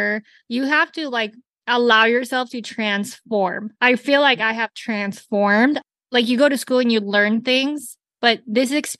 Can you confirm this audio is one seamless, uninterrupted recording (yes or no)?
no